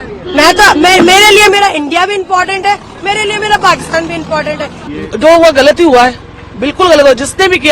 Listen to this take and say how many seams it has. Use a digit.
1